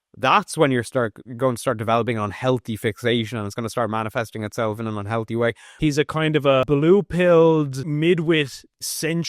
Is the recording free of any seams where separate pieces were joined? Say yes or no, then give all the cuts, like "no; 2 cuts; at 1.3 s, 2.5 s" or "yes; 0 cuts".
no; 3 cuts; at 5.7 s, 6.6 s, 7.9 s